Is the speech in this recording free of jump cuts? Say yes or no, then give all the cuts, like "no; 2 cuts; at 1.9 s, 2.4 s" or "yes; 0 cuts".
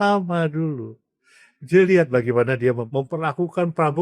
no; 1 cut; at 2.8 s